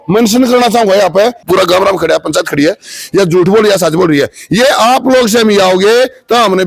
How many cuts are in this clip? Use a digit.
1